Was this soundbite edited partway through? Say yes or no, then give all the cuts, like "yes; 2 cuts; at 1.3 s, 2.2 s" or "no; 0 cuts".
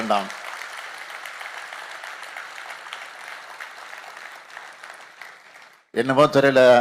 no; 0 cuts